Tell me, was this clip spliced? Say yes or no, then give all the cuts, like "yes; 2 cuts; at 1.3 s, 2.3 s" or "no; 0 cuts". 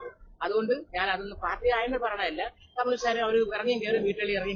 no; 0 cuts